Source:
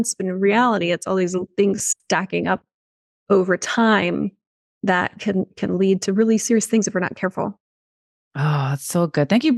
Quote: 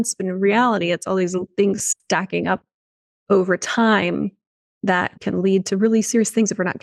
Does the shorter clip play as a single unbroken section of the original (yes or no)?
no